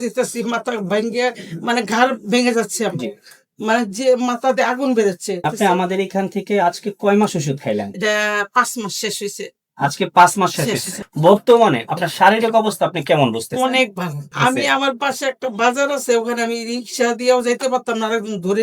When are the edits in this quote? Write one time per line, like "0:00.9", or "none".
0:05.4
0:11.0
0:14.3